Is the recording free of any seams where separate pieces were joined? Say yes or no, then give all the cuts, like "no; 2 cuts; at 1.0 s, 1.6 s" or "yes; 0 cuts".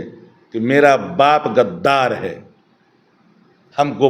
yes; 0 cuts